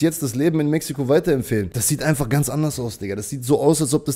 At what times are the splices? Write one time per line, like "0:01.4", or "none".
0:01.8

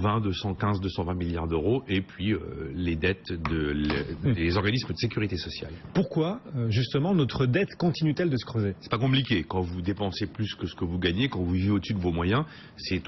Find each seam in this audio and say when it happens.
0:08.1

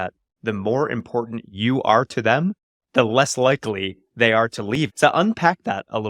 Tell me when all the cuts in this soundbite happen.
0:04.9

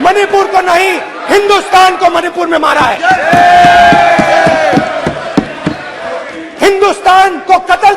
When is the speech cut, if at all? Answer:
none

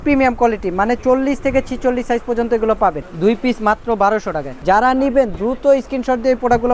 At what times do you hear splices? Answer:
0:03.1
0:04.5

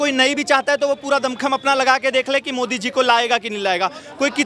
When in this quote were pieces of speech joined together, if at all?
none

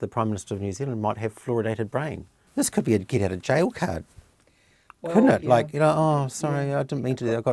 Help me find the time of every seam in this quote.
0:02.4

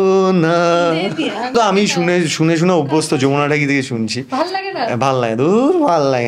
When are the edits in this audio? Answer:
0:01.5

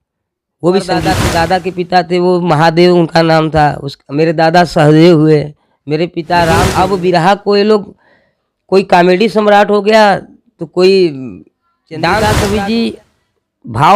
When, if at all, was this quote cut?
0:01.2
0:06.7
0:12.1

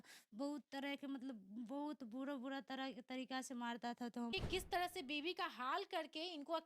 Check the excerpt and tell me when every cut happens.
0:04.3

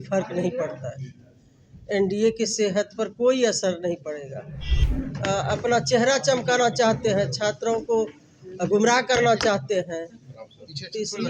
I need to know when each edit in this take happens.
0:04.8

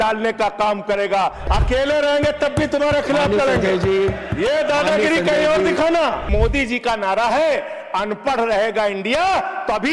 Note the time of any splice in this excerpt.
0:01.4
0:06.3

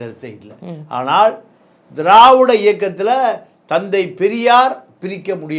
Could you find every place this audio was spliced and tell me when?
none

